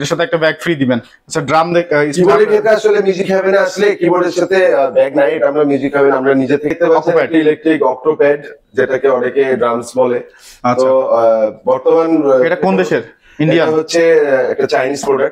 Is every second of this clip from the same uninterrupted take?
no; 1 cut; at 6.7 s

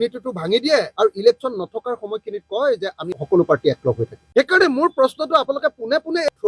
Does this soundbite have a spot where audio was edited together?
no; 0 cuts

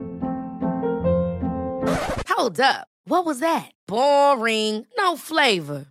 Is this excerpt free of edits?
yes; 0 cuts

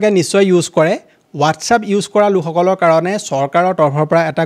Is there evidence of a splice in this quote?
no; 0 cuts

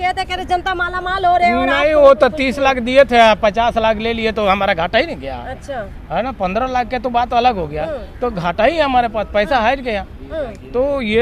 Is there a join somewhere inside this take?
no; 0 cuts

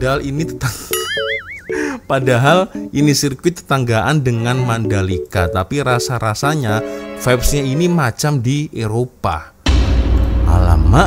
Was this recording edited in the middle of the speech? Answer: no; 0 cuts

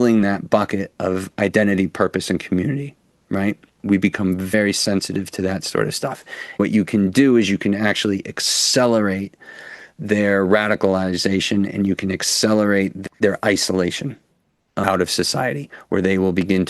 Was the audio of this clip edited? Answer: yes; 4 cuts; at 4.5 s, 6.6 s, 13.0 s, 14.8 s

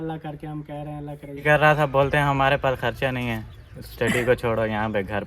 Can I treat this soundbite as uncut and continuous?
no; 1 cut; at 1.4 s

